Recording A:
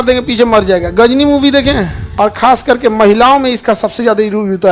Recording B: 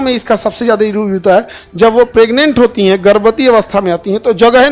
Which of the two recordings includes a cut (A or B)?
A